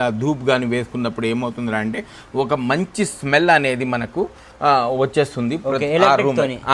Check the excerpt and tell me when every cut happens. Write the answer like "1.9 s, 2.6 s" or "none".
none